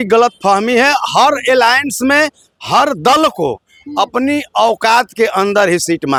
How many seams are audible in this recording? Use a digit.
0